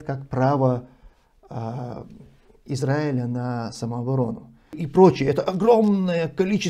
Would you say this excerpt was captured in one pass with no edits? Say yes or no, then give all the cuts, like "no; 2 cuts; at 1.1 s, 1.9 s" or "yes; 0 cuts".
no; 1 cut; at 4.8 s